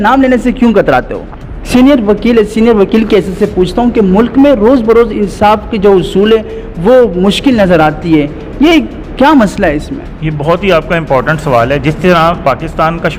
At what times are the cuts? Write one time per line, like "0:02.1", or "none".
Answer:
0:01.6